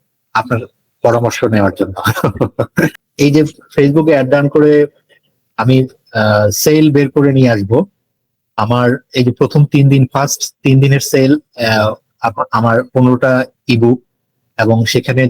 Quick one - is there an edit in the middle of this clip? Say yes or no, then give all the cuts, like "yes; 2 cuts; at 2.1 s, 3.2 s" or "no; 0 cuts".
yes; 1 cut; at 3.0 s